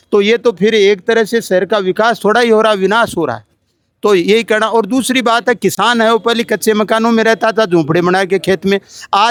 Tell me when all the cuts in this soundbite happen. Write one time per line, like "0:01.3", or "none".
none